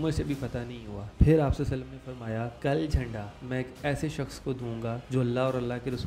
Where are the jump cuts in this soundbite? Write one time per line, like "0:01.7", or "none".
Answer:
0:02.5
0:03.3

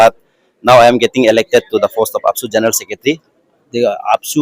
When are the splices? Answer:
0:03.3

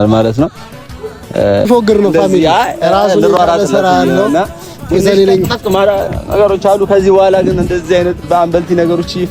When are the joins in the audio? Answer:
0:01.7

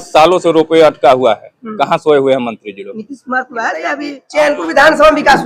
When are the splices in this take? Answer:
0:04.2

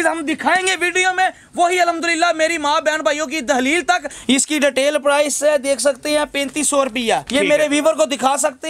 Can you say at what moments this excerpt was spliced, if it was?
0:04.1
0:07.3

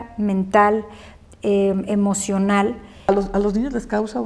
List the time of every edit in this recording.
0:03.1

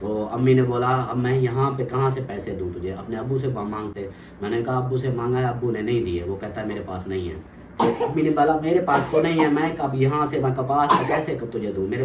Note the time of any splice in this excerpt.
none

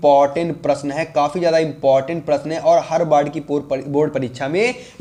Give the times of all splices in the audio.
none

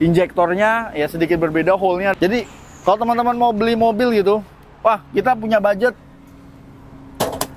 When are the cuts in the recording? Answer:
0:02.1

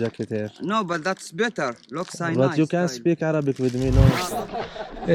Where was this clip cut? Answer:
0:04.2

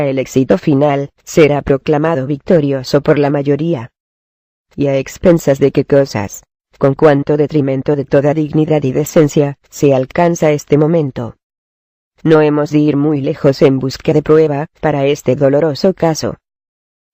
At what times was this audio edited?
0:13.0

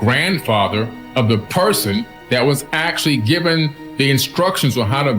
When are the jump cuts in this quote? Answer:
0:01.0
0:02.2
0:03.8

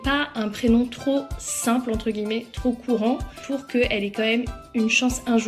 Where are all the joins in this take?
none

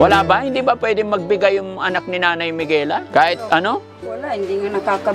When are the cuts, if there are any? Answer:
0:03.1

